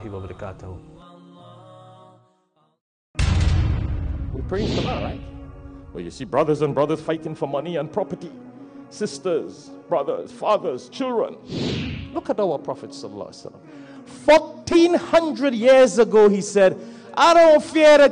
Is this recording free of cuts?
no; 1 cut; at 3.0 s

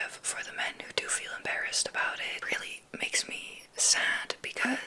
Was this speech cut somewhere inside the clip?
yes; 1 cut; at 2.4 s

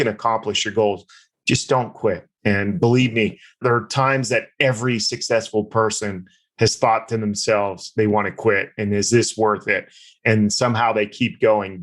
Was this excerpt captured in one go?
no; 1 cut; at 2.3 s

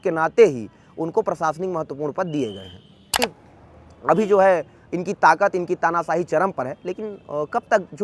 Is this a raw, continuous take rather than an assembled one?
no; 1 cut; at 3.1 s

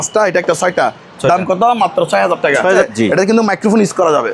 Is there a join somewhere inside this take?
yes; 1 cut; at 2.8 s

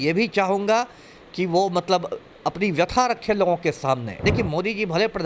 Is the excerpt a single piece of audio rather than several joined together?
no; 1 cut; at 4.2 s

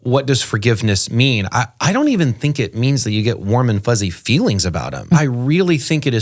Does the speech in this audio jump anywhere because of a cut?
yes; 1 cut; at 5.2 s

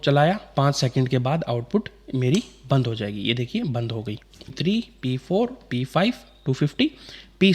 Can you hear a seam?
yes; 1 cut; at 4.6 s

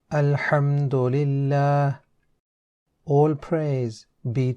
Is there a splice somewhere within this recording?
yes; 1 cut; at 1.8 s

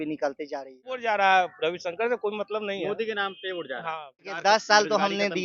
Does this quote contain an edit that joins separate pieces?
yes; 2 cuts; at 1.0 s, 4.3 s

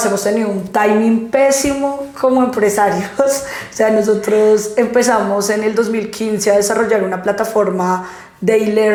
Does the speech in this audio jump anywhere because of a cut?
no; 0 cuts

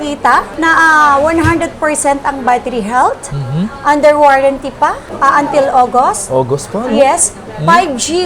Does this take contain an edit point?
yes; 1 cut; at 7.4 s

